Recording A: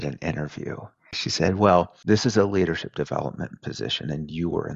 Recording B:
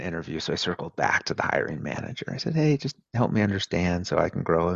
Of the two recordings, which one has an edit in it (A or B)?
A